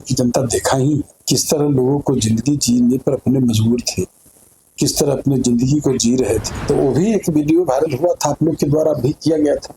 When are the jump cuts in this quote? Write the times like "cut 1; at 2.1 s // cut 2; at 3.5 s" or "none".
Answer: cut 1; at 1.2 s // cut 2; at 6.5 s

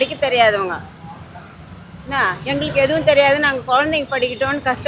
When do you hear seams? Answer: none

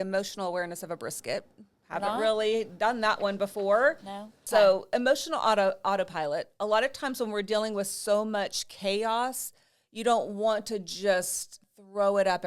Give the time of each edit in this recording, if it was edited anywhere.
cut 1; at 4.3 s

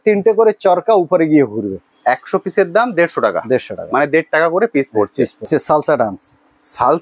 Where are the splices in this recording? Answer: cut 1; at 1.9 s // cut 2; at 5.5 s

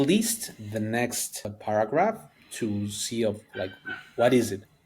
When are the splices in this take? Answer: cut 1; at 1.5 s

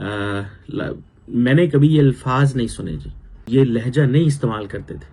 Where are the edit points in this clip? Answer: cut 1; at 3.5 s

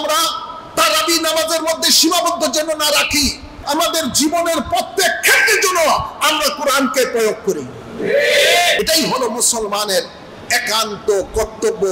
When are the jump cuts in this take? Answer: cut 1; at 3.5 s // cut 2; at 8.8 s

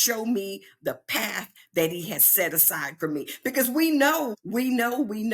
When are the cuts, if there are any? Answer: cut 1; at 4.4 s

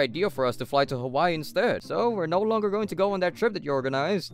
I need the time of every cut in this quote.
cut 1; at 1.8 s

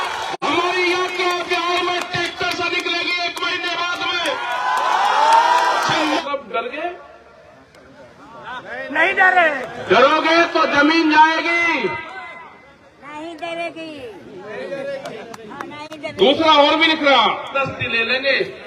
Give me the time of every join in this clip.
cut 1; at 6.2 s // cut 2; at 17.5 s

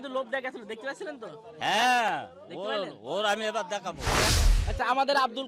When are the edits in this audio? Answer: cut 1; at 4.3 s

